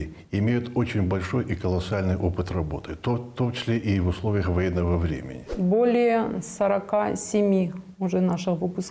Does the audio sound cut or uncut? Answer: cut